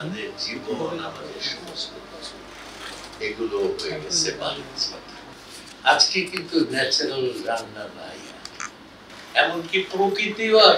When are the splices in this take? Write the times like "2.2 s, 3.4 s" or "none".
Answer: 5.3 s, 9.1 s